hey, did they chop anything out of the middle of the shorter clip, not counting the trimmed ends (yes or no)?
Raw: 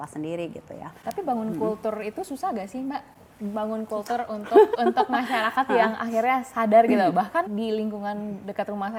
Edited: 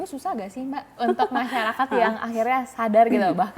yes